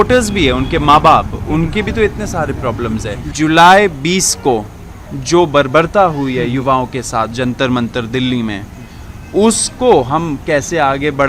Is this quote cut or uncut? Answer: cut